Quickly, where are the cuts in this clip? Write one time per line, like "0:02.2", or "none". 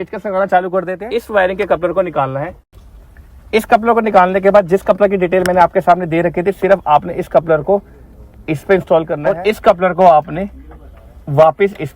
0:01.0
0:09.2